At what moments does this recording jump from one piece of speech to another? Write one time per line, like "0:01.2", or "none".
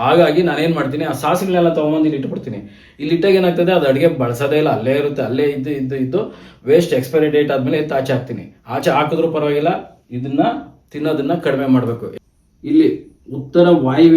0:12.1